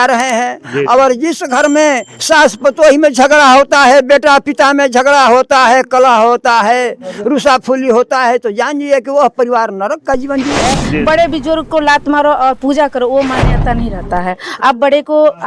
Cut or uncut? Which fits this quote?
cut